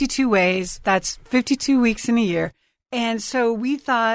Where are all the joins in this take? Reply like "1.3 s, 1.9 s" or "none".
none